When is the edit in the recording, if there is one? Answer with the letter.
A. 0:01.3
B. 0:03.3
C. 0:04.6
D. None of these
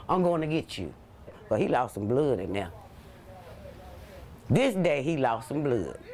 A